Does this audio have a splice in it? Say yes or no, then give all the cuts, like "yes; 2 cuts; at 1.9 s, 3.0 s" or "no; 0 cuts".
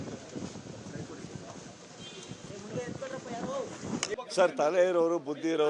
yes; 1 cut; at 4.1 s